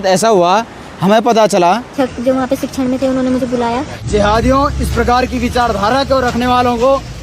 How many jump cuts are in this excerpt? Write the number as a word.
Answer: two